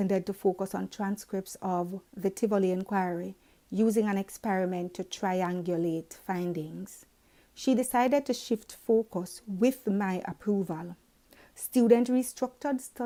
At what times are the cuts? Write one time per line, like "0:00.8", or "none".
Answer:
none